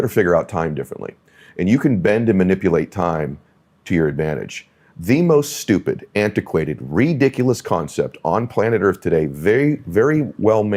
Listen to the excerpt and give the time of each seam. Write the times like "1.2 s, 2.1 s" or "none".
none